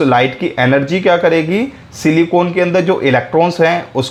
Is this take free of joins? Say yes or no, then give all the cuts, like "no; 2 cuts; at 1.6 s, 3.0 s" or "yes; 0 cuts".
yes; 0 cuts